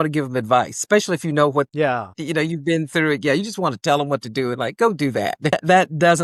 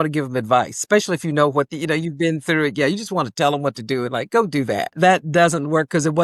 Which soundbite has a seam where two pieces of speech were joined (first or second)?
second